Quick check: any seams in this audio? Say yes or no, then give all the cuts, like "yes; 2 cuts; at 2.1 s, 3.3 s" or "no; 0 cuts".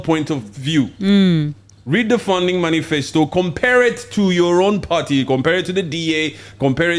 no; 0 cuts